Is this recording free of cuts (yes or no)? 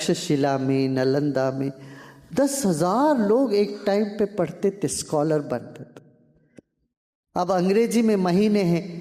yes